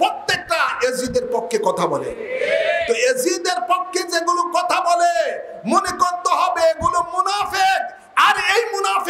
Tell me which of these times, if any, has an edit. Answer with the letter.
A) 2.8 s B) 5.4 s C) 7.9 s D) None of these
D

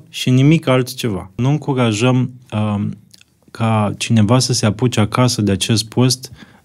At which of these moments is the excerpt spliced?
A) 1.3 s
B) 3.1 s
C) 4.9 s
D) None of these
A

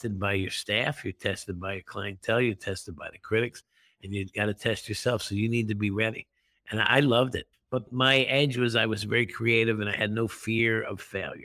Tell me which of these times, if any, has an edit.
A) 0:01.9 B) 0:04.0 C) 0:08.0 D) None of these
D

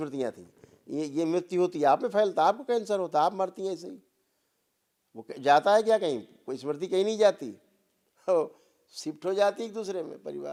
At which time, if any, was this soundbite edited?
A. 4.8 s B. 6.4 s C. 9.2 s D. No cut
D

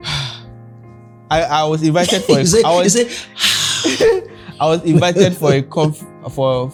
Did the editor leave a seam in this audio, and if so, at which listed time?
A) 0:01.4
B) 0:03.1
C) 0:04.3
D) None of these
D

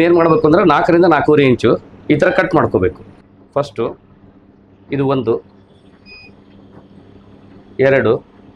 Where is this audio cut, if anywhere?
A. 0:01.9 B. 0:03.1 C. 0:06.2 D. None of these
B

